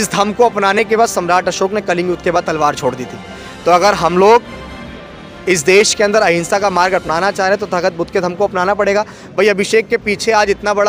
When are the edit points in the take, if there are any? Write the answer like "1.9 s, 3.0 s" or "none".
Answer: none